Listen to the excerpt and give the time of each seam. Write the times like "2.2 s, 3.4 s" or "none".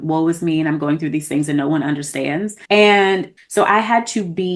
3.3 s